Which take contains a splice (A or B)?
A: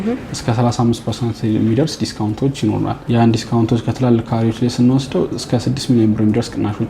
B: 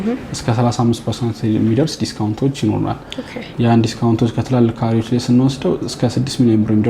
A